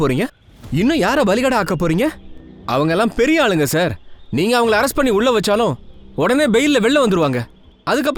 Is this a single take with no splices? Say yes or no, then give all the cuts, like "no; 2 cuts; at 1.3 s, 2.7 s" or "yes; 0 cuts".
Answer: yes; 0 cuts